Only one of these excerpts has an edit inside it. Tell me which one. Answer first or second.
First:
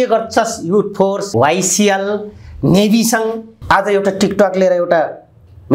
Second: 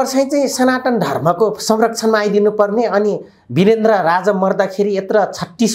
first